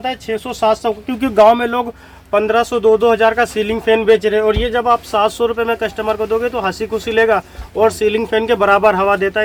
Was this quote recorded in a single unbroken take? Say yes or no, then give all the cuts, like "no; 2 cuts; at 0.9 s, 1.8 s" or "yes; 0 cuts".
yes; 0 cuts